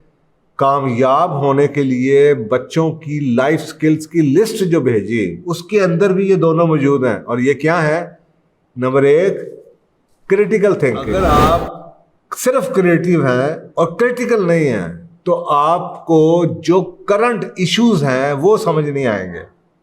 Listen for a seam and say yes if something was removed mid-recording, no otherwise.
yes